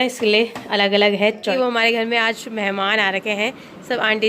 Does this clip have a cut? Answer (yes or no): yes